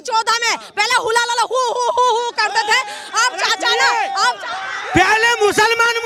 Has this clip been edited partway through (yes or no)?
no